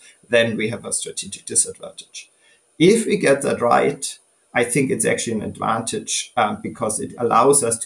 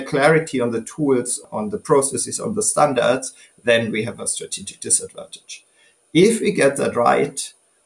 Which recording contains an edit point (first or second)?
second